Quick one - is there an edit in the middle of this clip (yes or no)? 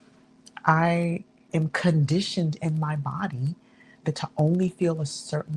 yes